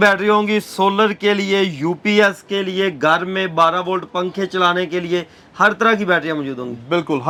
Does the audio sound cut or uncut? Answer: uncut